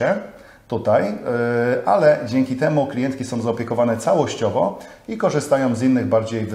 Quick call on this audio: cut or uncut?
uncut